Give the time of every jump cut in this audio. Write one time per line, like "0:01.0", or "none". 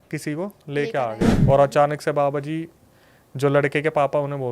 0:01.3